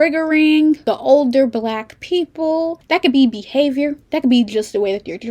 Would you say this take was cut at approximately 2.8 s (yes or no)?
yes